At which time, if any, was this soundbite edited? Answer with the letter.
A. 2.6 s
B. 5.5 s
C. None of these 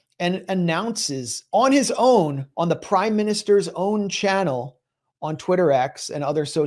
C